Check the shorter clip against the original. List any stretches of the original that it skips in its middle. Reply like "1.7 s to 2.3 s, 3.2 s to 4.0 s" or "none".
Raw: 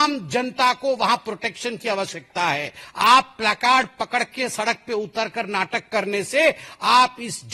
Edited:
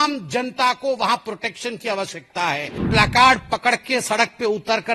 2.9 s to 3.3 s